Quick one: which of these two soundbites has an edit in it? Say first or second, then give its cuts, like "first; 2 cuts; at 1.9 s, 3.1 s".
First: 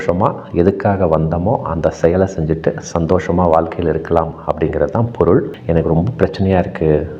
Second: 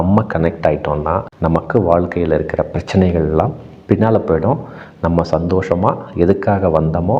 first; 1 cut; at 5.5 s